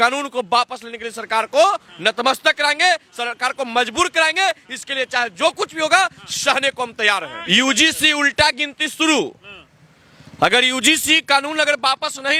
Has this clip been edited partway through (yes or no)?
no